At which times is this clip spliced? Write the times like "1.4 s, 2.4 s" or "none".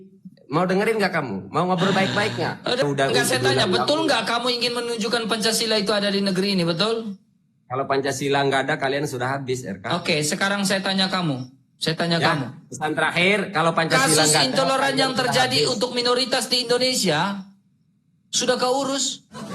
2.8 s